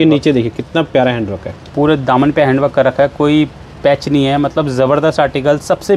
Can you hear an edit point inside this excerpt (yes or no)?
no